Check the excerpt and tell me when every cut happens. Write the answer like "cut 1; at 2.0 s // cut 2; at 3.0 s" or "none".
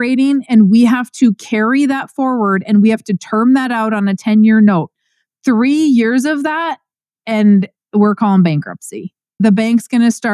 cut 1; at 9.4 s